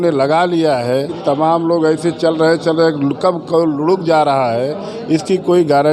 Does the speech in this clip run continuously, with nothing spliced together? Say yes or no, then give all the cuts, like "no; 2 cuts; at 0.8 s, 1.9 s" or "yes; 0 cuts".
no; 1 cut; at 1.1 s